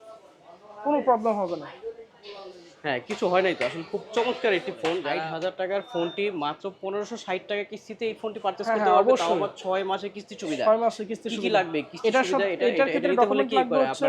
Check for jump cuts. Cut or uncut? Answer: cut